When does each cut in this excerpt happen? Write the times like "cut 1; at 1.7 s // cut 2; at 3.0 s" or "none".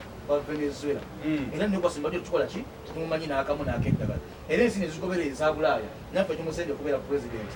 none